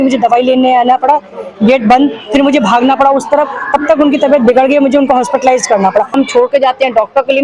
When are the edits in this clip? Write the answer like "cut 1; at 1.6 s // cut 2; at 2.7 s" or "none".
cut 1; at 6.1 s